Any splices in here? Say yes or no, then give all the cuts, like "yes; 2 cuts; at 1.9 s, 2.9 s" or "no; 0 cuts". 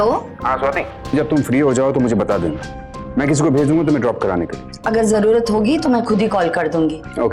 yes; 2 cuts; at 1.1 s, 4.6 s